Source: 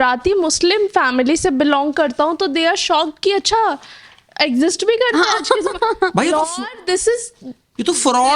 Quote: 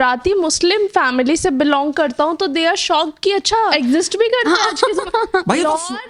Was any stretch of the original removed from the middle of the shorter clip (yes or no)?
yes